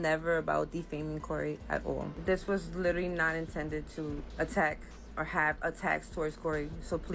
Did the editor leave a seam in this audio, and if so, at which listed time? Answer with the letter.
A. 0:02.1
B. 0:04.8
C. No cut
A